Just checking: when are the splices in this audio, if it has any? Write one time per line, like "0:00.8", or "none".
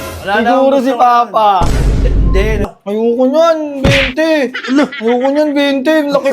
0:02.6